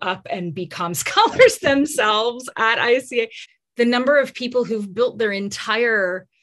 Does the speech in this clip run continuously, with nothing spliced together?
no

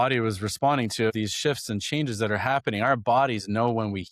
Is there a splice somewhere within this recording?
yes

